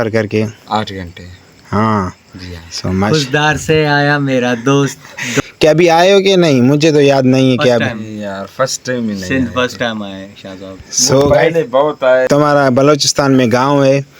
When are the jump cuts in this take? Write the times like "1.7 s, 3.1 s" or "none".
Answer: 5.4 s, 12.3 s

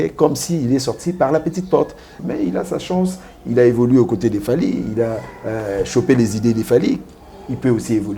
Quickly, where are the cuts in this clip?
2.2 s

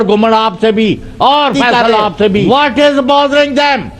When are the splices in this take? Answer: 2.5 s

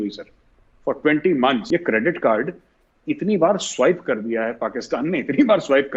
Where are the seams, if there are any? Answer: 1.6 s

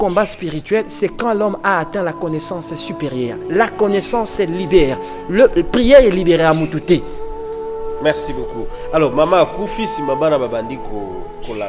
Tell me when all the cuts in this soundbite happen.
none

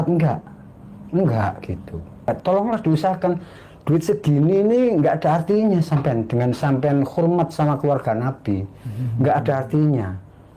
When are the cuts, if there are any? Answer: 2.3 s

